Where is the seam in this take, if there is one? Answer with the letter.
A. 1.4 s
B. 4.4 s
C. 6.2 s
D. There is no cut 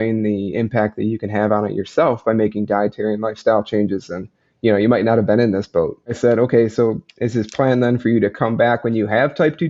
C